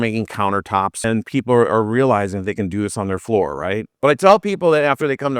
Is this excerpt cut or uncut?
cut